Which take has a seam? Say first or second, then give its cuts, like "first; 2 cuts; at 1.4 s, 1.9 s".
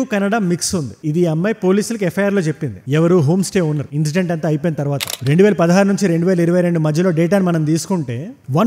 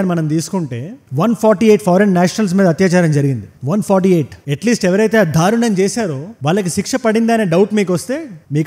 first; 1 cut; at 5.0 s